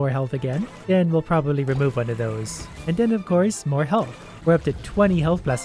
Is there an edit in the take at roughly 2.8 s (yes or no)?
yes